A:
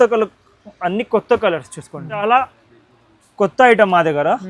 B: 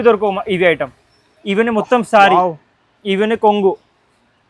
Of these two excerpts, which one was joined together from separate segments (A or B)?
A